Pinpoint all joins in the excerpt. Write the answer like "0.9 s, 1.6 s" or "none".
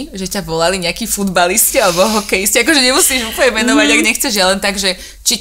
none